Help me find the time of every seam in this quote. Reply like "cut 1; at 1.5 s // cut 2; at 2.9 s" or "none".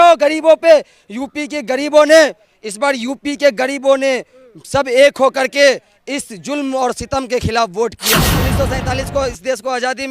cut 1; at 8.3 s

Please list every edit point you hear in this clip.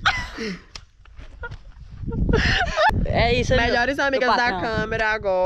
cut 1; at 2.9 s

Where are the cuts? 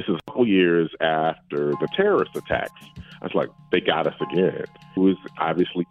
cut 1; at 5.0 s

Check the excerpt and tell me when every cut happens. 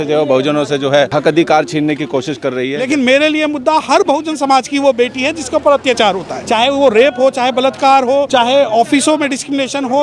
cut 1; at 1.1 s // cut 2; at 2.8 s // cut 3; at 6.3 s // cut 4; at 8.3 s

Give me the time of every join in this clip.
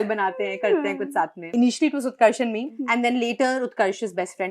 cut 1; at 1.5 s // cut 2; at 2.8 s

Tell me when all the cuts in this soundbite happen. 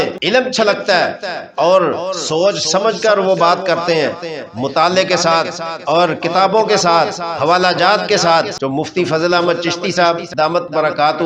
cut 1; at 8.6 s // cut 2; at 10.3 s

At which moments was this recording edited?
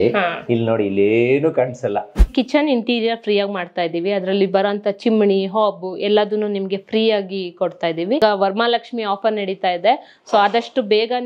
cut 1; at 2.2 s // cut 2; at 8.2 s

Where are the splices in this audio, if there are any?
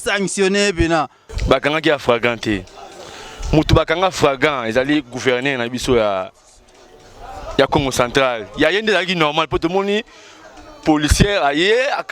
cut 1; at 1.3 s

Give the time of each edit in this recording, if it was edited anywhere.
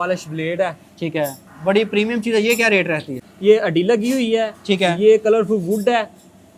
cut 1; at 1.4 s // cut 2; at 3.3 s

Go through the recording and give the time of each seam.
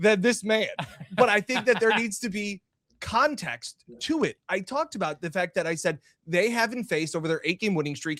none

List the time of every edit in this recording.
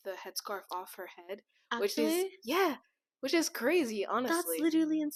none

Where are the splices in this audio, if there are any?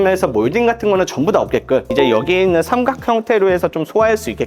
cut 1; at 1.9 s

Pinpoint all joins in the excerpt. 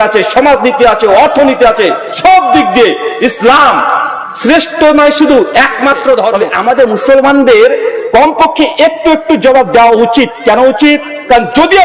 cut 1; at 6.3 s

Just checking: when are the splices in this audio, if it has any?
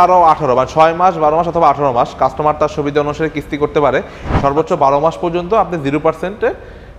cut 1; at 4.2 s

